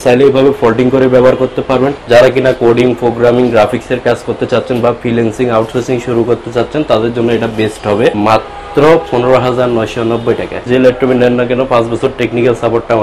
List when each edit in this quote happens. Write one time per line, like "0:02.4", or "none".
0:01.9
0:08.2
0:10.7